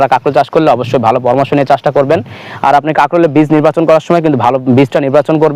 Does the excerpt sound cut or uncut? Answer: uncut